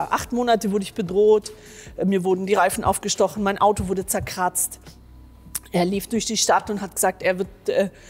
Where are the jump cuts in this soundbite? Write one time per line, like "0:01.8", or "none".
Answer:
none